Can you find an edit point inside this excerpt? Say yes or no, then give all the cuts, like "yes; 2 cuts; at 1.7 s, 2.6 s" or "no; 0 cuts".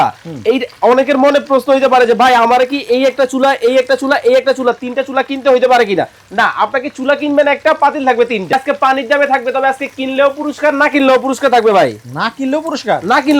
yes; 1 cut; at 8.5 s